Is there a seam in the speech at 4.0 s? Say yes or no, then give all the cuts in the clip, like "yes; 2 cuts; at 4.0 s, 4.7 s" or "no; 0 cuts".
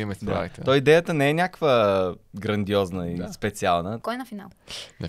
yes; 1 cut; at 4.0 s